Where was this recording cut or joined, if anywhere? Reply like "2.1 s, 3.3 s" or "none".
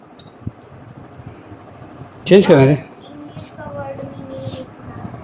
none